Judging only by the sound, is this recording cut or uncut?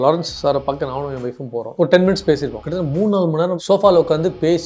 cut